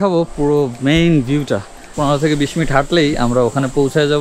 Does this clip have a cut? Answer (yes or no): yes